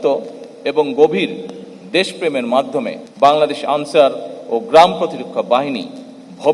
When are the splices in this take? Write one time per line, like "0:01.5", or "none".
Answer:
0:03.0